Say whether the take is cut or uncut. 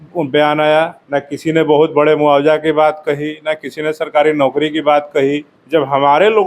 cut